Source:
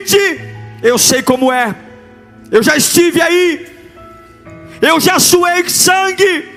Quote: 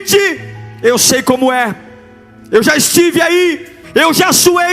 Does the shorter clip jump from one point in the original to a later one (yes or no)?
yes